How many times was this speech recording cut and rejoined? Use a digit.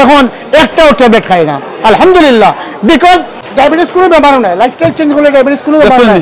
1